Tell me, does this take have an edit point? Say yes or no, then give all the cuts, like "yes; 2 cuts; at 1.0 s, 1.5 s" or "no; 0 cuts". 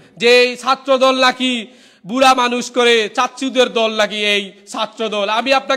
no; 0 cuts